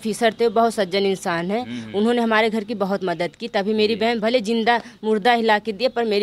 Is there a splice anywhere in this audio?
no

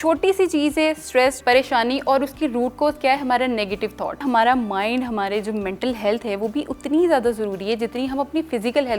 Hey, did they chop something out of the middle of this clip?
yes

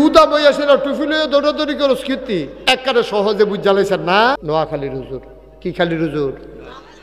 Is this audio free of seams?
no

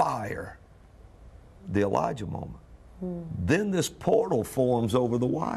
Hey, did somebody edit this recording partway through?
yes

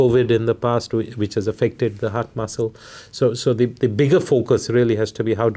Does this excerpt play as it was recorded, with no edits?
yes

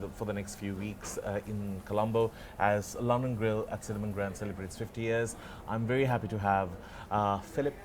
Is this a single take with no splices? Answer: yes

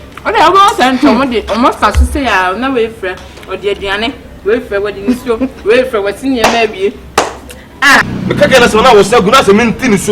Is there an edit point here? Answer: yes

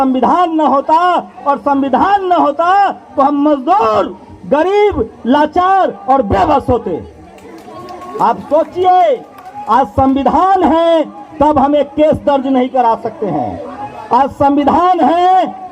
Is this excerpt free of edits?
yes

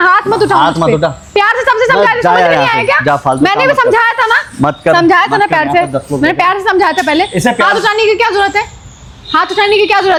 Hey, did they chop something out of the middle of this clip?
no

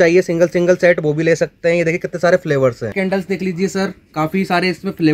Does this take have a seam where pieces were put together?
yes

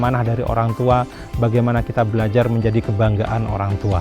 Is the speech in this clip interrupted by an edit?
no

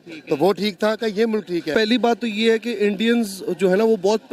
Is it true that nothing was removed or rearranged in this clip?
no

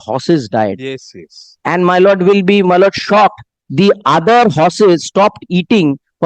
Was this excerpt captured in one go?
yes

